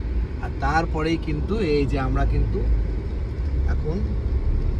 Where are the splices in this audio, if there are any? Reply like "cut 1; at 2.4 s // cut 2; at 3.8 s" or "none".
none